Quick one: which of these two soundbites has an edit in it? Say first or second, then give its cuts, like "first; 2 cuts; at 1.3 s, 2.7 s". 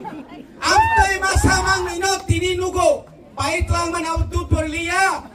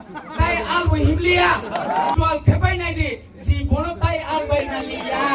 second; 1 cut; at 2.1 s